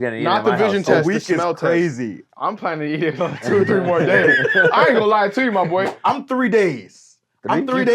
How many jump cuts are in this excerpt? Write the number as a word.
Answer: two